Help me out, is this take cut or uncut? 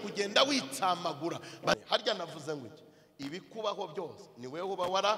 cut